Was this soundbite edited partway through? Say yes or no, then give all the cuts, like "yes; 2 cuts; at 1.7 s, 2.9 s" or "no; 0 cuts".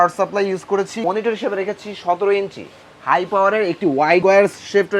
yes; 2 cuts; at 1.0 s, 4.2 s